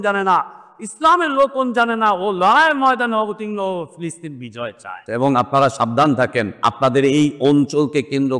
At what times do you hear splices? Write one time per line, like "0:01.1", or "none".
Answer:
0:05.0
0:06.5